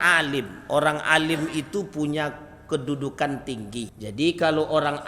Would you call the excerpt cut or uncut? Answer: cut